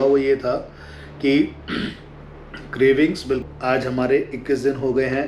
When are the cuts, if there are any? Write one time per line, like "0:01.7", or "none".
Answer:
0:03.4